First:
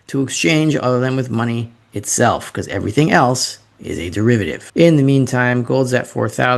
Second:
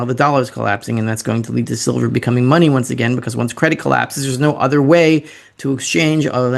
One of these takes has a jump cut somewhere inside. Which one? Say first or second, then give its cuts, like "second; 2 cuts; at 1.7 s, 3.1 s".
first; 1 cut; at 4.6 s